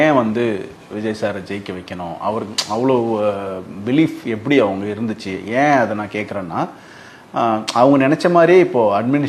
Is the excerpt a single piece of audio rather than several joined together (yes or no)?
yes